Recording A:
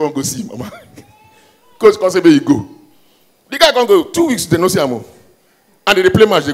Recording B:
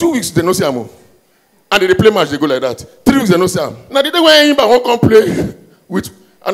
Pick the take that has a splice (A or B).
B